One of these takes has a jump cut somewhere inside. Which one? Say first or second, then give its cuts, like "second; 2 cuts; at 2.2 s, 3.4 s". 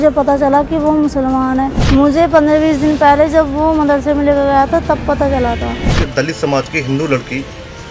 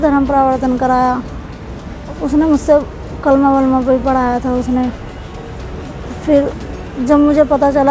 first; 2 cuts; at 1.8 s, 5.9 s